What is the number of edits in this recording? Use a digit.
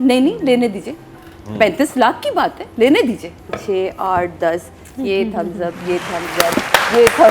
1